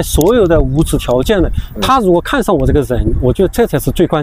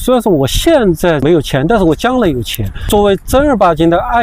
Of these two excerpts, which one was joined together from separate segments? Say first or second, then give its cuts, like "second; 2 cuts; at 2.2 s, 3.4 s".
second; 2 cuts; at 1.2 s, 2.8 s